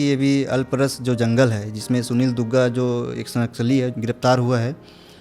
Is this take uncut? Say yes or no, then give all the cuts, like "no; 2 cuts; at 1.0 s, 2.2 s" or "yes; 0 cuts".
yes; 0 cuts